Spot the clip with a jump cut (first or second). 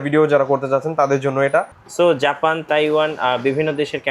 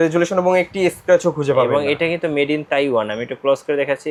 first